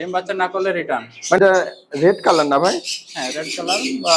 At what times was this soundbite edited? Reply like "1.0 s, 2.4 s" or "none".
1.4 s